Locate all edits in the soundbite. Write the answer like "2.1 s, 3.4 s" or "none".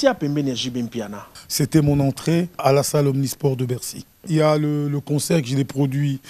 1.3 s, 2.6 s, 4.3 s